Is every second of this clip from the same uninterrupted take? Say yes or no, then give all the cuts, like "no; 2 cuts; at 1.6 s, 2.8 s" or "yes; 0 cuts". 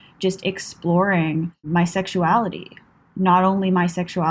no; 1 cut; at 1.6 s